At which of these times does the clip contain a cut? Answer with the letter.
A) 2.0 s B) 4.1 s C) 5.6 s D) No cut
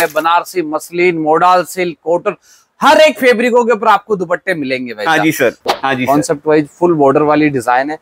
C